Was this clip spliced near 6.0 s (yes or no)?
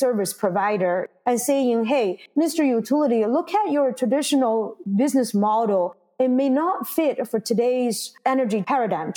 no